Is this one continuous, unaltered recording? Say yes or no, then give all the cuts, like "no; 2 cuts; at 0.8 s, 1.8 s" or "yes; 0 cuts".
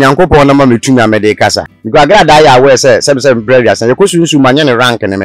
no; 1 cut; at 1.7 s